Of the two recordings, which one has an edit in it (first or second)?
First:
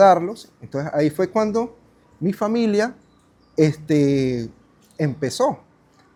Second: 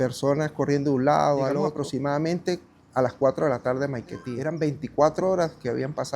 second